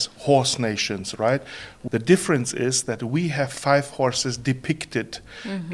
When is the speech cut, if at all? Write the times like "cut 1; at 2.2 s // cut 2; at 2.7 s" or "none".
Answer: cut 1; at 1.7 s